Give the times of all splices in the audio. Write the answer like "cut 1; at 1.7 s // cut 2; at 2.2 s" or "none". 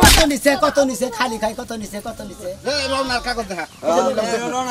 cut 1; at 2.5 s